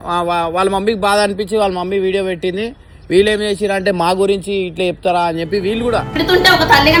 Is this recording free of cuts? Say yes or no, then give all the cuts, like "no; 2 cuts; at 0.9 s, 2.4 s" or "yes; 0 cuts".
yes; 0 cuts